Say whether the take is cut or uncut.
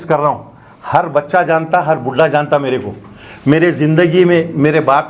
uncut